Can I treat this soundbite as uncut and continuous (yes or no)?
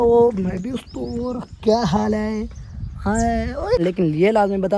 no